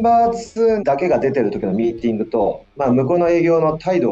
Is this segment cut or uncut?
cut